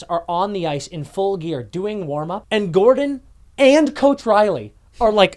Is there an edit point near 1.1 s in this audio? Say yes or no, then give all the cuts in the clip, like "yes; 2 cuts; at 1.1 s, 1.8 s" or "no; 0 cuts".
no; 1 cut; at 2.4 s